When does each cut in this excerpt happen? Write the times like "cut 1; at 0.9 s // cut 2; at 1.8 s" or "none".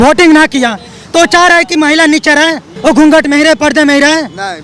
cut 1; at 2.7 s